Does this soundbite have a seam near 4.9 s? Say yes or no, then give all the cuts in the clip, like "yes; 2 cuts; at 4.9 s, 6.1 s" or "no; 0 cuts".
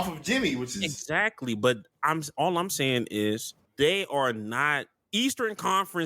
yes; 2 cuts; at 3.6 s, 4.9 s